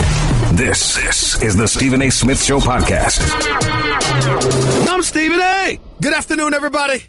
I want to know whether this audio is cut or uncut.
cut